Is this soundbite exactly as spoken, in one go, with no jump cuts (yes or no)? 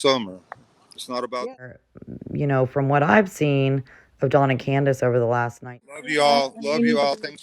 no